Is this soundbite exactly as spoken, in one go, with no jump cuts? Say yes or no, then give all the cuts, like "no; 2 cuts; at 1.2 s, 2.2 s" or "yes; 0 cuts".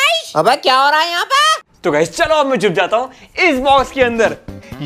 yes; 0 cuts